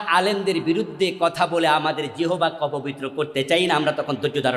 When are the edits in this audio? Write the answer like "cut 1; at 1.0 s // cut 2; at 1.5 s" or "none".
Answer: none